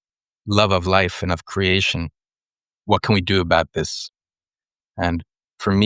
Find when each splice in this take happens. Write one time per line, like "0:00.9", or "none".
0:02.7